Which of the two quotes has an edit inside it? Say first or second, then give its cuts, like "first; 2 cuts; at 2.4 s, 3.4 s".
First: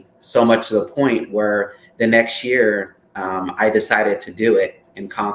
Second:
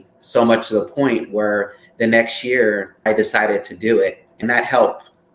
second; 2 cuts; at 2.9 s, 4.4 s